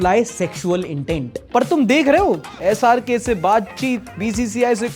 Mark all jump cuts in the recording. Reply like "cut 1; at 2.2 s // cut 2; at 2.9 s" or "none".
cut 1; at 1.3 s